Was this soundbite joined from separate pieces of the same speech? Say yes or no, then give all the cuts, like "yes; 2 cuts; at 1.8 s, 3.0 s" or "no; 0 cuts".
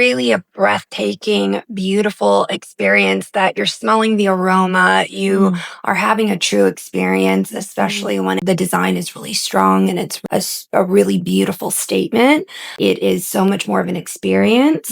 yes; 3 cuts; at 8.4 s, 10.1 s, 12.7 s